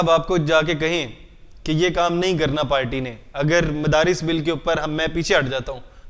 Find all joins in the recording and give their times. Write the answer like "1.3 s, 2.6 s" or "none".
none